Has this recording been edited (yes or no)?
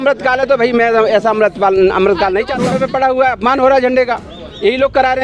yes